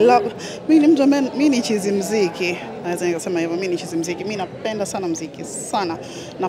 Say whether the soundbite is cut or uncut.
uncut